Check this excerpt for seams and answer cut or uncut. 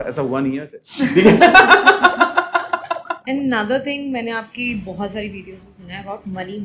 cut